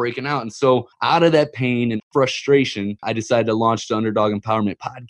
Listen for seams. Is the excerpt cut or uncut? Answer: cut